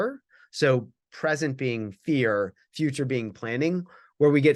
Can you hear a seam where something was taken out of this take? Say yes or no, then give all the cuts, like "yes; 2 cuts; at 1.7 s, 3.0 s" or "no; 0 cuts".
no; 0 cuts